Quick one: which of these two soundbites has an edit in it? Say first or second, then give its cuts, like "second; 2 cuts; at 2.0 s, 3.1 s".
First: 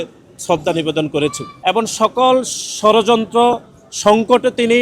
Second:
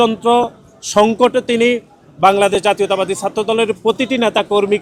first; 1 cut; at 1.5 s